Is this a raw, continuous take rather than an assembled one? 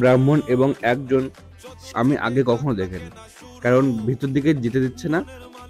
no; 1 cut; at 1.9 s

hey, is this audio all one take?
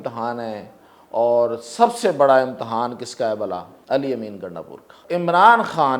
no; 2 cuts; at 3.7 s, 5.0 s

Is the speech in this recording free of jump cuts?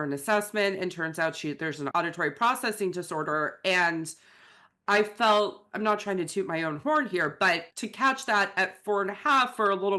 no; 2 cuts; at 1.9 s, 7.6 s

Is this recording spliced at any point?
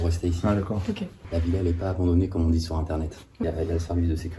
yes; 2 cuts; at 1.2 s, 3.4 s

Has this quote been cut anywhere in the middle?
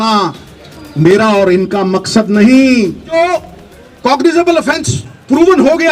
yes; 1 cut; at 3.1 s

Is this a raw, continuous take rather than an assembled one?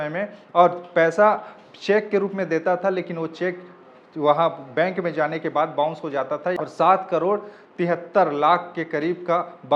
no; 1 cut; at 6.6 s

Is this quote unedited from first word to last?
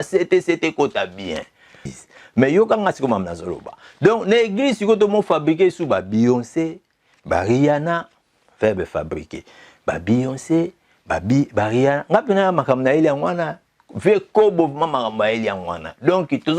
no; 1 cut; at 1.9 s

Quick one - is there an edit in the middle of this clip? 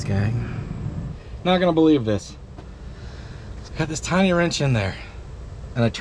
no; 0 cuts

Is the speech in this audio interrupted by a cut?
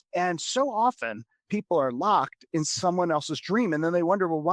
no; 0 cuts

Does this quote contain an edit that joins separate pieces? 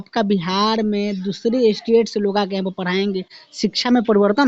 no; 0 cuts

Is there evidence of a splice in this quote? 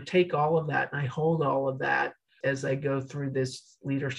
yes; 1 cut; at 2.2 s

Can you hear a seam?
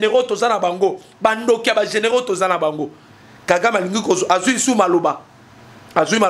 no; 0 cuts

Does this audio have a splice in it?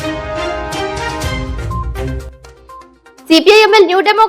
yes; 1 cut; at 2.2 s

